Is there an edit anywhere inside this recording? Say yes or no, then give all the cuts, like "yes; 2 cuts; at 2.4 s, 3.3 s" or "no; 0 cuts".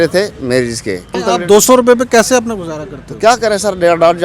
yes; 1 cut; at 1.2 s